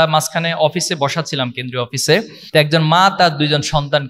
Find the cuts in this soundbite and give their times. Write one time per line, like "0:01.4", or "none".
0:02.4